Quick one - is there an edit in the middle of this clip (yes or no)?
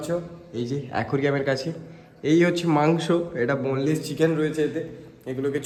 no